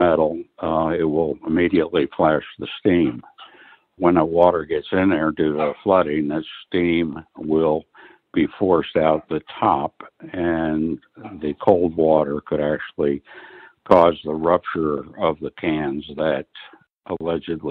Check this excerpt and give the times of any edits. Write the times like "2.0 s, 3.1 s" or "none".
none